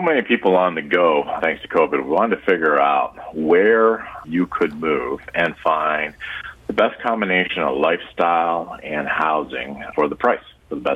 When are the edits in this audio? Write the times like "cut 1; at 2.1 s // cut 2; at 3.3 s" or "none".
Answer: cut 1; at 1.4 s // cut 2; at 4.2 s // cut 3; at 9.9 s